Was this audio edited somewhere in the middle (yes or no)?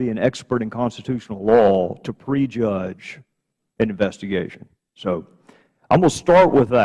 yes